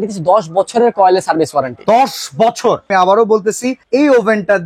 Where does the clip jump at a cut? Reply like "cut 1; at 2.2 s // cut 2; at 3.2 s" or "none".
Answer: cut 1; at 2.9 s